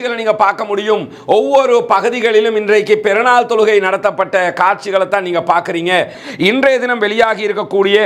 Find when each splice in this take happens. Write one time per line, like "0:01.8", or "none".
0:06.1